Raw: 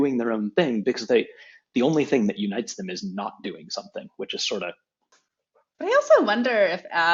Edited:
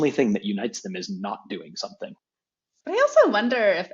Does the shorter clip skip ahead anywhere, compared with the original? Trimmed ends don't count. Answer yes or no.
yes